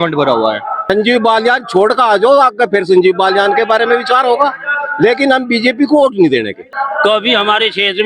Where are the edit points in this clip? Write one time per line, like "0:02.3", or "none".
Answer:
0:00.8
0:06.6